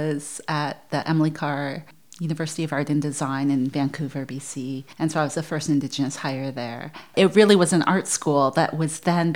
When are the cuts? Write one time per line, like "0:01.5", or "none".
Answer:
0:04.8
0:07.1